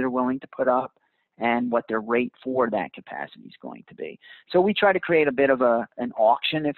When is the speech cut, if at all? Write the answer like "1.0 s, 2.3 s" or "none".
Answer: none